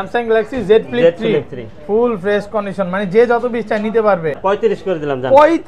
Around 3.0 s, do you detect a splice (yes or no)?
no